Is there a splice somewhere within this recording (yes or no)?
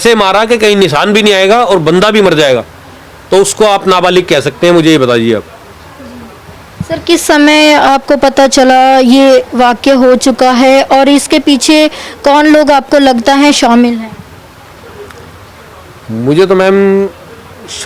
no